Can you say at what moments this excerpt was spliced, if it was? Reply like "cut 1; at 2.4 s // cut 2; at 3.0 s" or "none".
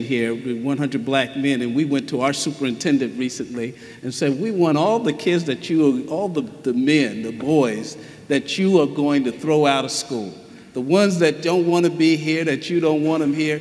none

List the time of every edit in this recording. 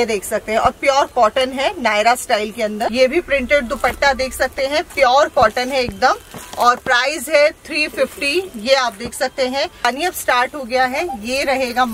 cut 1; at 2.9 s // cut 2; at 9.8 s

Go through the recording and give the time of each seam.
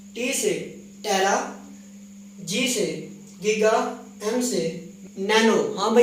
cut 1; at 4.9 s

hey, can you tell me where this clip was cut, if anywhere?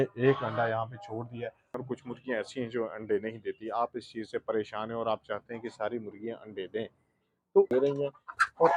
cut 1; at 1.8 s // cut 2; at 7.7 s

